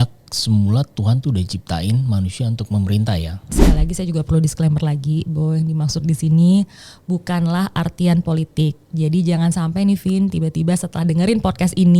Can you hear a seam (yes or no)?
yes